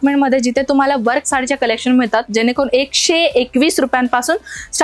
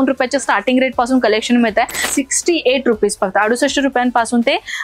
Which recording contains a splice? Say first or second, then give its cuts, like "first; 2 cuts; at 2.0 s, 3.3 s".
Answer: second; 1 cut; at 2.0 s